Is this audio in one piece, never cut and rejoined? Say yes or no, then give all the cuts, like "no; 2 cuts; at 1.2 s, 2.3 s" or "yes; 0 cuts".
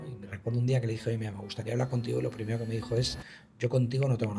yes; 0 cuts